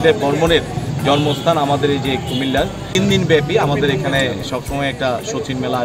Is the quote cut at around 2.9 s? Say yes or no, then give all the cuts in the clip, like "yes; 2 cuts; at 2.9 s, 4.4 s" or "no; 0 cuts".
yes; 1 cut; at 2.9 s